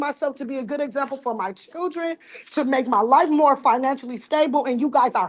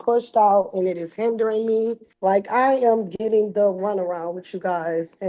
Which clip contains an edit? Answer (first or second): second